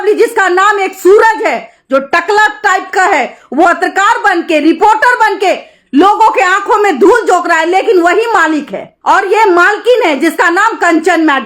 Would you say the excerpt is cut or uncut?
uncut